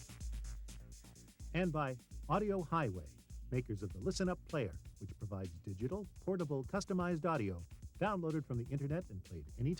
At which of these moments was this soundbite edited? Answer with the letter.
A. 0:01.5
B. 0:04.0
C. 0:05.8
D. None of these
A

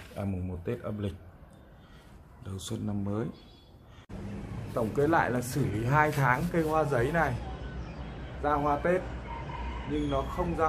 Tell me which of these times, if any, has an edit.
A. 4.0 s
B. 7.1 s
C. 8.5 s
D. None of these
A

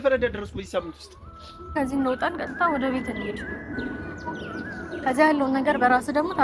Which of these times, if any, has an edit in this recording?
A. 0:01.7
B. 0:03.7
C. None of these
A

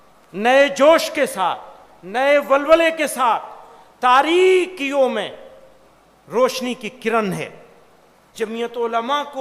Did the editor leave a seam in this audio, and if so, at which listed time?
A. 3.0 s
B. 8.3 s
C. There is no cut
B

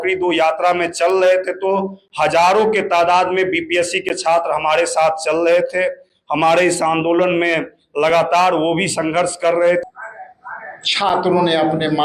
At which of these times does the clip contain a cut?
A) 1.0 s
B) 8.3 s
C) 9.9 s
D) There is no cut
C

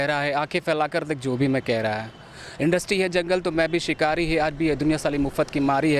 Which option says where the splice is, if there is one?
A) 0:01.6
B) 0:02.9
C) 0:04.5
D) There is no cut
D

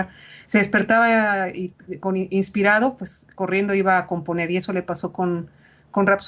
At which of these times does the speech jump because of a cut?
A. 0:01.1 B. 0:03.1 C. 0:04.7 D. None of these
D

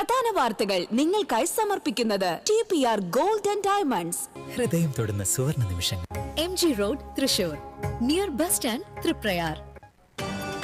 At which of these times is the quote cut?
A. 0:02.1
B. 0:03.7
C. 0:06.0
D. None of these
D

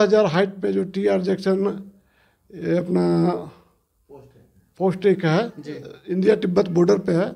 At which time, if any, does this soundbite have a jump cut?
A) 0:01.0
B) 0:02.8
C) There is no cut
C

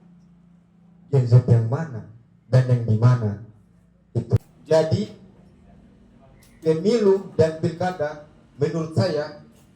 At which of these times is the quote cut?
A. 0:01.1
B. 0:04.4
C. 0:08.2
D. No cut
B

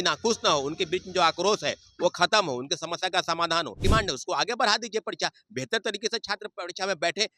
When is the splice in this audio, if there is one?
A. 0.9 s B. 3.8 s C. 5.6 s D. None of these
B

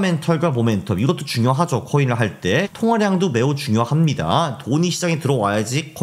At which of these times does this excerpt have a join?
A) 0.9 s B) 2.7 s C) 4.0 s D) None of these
B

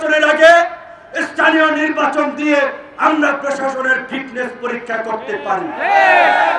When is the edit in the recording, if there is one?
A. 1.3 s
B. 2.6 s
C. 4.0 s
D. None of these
D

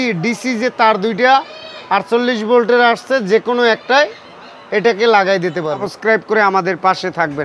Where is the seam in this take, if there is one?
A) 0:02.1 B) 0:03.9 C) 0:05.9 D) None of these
C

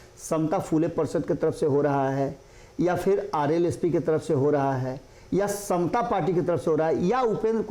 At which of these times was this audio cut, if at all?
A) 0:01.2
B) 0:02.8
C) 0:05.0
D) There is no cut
D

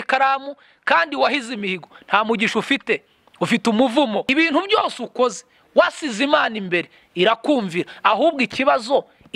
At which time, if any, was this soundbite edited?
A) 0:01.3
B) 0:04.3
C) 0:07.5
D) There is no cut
B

